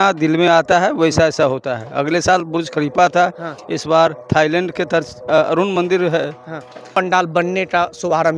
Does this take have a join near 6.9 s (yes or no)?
yes